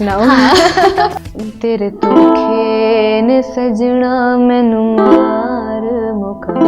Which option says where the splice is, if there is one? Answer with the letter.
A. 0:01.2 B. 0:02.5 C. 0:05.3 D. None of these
A